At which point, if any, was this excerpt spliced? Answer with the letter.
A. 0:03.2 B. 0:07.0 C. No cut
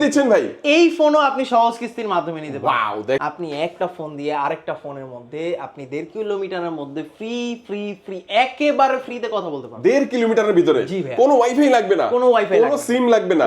A